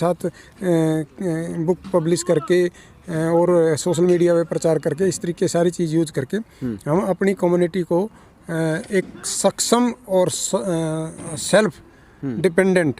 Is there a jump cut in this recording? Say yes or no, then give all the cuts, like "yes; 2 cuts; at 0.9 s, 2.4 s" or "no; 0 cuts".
no; 0 cuts